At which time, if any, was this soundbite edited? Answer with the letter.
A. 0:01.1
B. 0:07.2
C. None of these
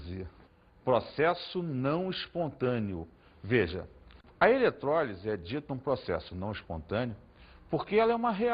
A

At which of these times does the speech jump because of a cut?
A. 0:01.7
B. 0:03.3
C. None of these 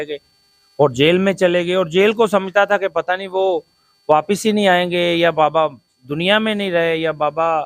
C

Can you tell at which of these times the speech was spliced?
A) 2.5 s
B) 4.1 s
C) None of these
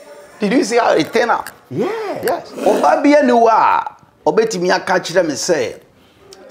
A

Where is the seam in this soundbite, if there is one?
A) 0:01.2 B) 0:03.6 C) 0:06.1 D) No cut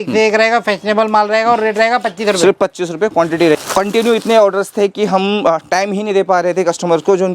B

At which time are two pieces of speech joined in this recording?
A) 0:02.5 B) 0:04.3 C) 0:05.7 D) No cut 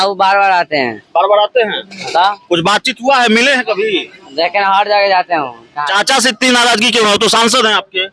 C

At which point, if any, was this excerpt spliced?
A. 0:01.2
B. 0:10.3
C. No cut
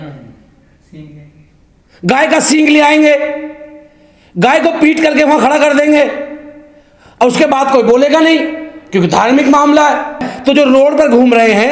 B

